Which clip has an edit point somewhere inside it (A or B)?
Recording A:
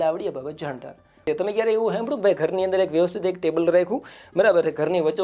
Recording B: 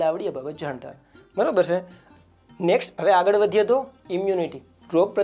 A